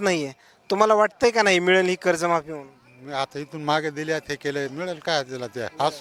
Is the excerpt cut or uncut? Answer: uncut